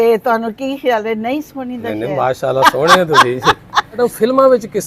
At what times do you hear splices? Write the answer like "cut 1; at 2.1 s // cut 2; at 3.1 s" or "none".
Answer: cut 1; at 4.0 s